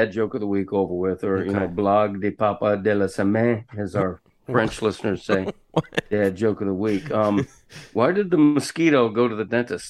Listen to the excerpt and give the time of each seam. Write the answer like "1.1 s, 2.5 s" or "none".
none